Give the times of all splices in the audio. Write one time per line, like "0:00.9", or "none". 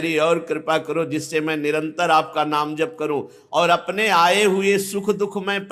none